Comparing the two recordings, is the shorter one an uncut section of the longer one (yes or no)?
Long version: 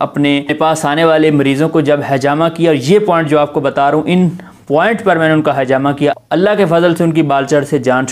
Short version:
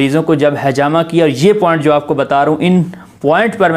yes